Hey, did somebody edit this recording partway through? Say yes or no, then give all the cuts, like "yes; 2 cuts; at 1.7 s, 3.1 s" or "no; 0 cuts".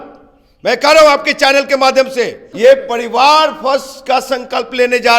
yes; 1 cut; at 2.4 s